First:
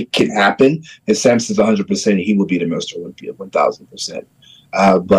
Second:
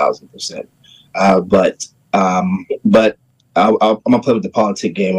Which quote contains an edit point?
second; 1 cut; at 2.7 s

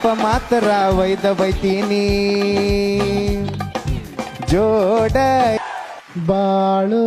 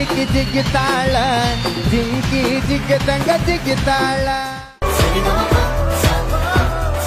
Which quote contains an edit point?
first; 1 cut; at 5.6 s

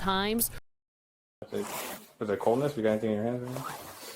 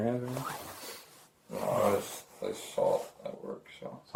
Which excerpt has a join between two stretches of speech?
first; 1 cut; at 1.5 s

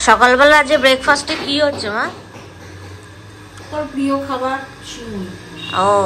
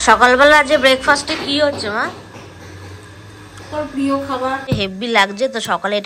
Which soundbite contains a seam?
second; 1 cut; at 4.7 s

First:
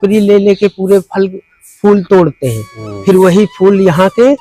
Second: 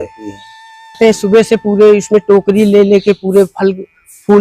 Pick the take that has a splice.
second; 1 cut; at 1.0 s

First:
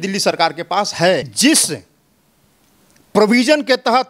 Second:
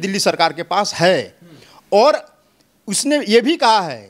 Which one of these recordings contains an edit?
first; 1 cut; at 1.3 s

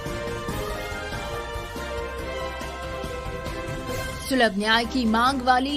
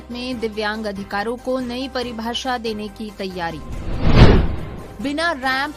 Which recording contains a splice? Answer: first; 1 cut; at 4.2 s

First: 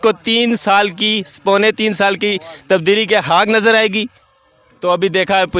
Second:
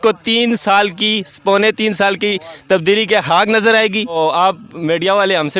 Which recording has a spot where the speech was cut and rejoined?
first; 1 cut; at 4.1 s

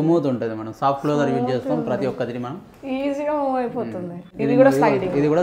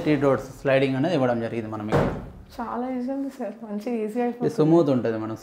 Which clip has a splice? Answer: first; 1 cut; at 4.3 s

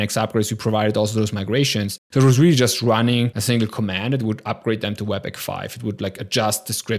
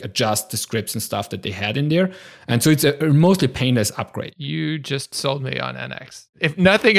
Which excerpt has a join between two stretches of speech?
first; 2 cuts; at 2.0 s, 3.4 s

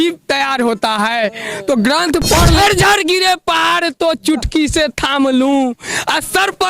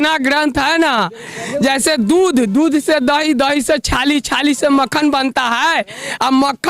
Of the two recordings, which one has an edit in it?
first; 1 cut; at 2.6 s

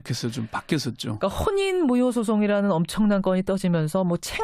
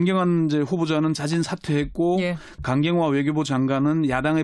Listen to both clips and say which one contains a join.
second; 1 cut; at 2.3 s

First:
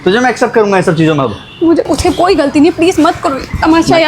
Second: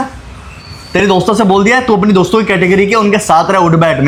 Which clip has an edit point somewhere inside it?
first; 1 cut; at 1.9 s

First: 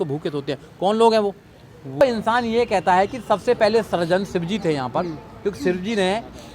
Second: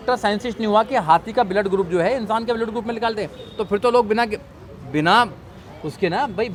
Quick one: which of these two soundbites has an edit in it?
first; 1 cut; at 2.0 s

